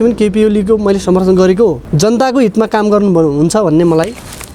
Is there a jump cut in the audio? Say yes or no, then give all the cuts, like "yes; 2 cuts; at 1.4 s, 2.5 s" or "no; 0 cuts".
yes; 1 cut; at 1.8 s